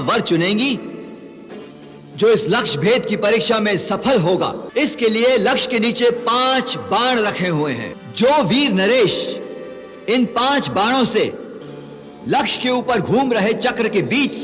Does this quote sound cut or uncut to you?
cut